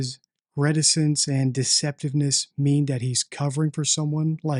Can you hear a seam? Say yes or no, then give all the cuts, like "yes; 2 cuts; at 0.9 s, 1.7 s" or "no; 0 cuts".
no; 0 cuts